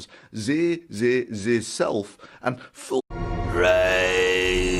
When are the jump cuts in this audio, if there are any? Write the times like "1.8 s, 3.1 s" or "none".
none